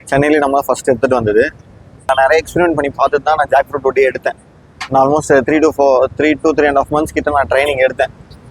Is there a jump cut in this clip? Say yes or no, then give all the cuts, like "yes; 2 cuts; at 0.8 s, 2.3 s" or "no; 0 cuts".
yes; 1 cut; at 2.1 s